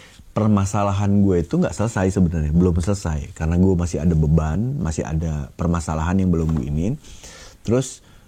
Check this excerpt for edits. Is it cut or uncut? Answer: uncut